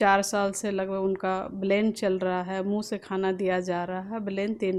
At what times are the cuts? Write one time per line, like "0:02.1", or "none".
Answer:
none